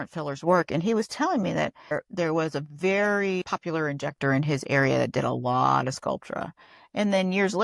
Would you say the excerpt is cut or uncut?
cut